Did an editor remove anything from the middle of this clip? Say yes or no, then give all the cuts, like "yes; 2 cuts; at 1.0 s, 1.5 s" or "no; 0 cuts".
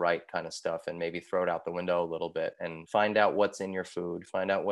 yes; 1 cut; at 2.7 s